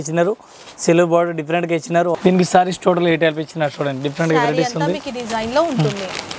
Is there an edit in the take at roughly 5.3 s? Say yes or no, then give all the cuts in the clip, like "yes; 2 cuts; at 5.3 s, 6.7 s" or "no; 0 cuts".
no; 1 cut; at 2.1 s